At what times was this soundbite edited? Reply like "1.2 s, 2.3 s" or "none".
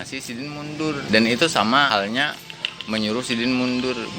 1.0 s, 1.9 s